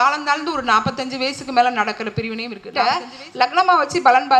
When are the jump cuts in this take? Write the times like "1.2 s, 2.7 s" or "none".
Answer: 2.6 s